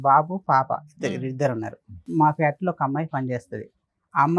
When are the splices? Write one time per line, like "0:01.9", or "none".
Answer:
0:02.1

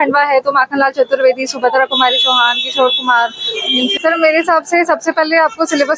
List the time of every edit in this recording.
0:03.9

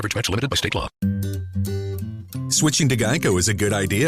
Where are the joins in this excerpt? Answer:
0:01.0

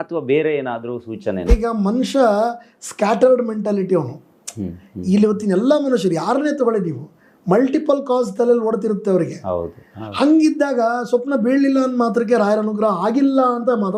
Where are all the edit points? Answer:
0:01.5

